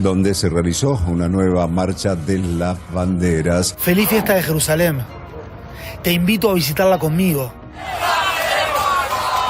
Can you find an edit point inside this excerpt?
yes; 1 cut; at 3.7 s

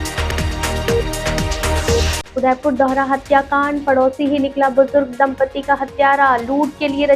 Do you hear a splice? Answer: yes; 1 cut; at 2.2 s

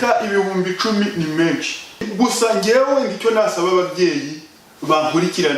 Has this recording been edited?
yes; 1 cut; at 2.1 s

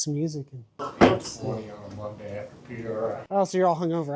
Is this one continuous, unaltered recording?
yes; 0 cuts

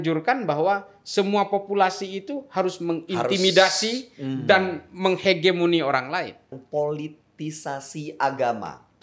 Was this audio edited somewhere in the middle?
yes; 1 cut; at 6.5 s

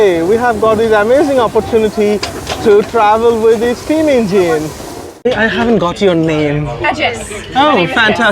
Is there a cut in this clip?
yes; 1 cut; at 5.3 s

